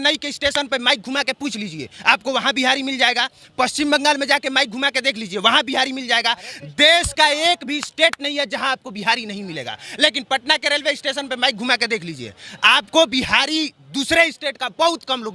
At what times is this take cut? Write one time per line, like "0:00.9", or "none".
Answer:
none